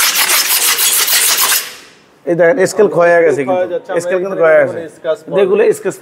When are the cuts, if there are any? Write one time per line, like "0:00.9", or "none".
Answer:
none